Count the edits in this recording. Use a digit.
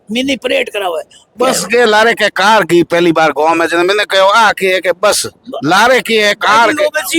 1